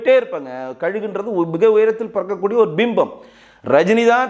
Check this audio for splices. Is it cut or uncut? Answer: uncut